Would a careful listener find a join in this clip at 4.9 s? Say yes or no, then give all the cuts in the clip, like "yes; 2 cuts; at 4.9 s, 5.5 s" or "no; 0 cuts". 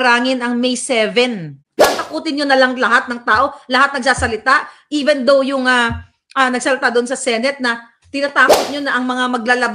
no; 1 cut; at 1.6 s